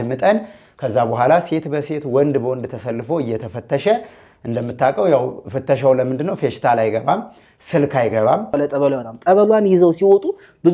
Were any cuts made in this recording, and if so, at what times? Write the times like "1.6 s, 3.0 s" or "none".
8.5 s